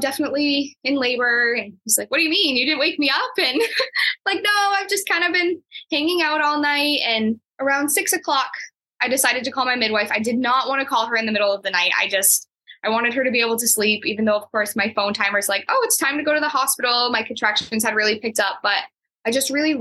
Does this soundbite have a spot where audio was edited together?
no; 0 cuts

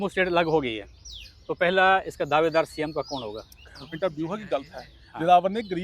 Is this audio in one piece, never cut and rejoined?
no; 1 cut; at 4.0 s

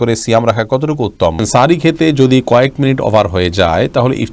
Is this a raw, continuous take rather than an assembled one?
no; 1 cut; at 1.4 s

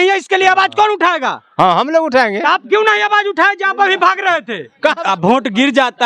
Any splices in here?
yes; 1 cut; at 5.0 s

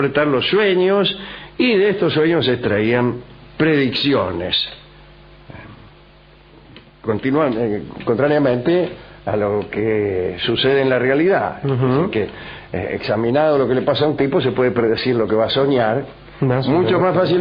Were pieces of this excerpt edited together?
yes; 1 cut; at 4.5 s

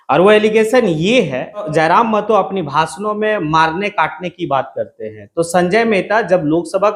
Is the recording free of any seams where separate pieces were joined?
no; 1 cut; at 1.7 s

